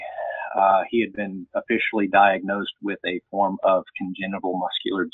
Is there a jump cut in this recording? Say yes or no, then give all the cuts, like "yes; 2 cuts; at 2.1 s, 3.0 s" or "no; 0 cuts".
no; 0 cuts